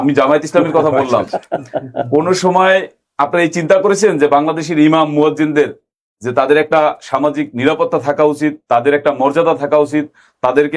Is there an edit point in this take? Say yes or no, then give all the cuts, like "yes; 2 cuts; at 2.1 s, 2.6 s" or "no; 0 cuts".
no; 0 cuts